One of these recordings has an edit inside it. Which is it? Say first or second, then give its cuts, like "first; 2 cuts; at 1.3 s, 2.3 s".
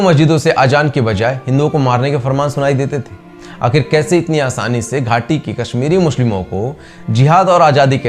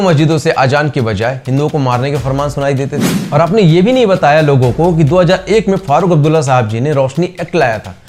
second; 1 cut; at 3.1 s